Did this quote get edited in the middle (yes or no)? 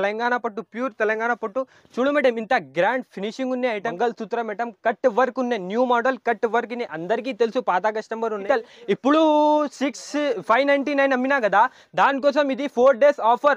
yes